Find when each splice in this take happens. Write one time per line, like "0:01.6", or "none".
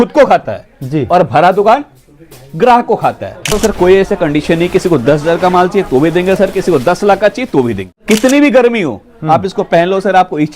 0:03.5
0:08.0